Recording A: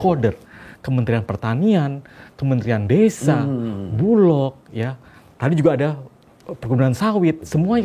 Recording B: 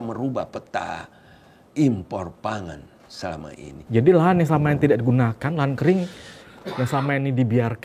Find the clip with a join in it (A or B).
B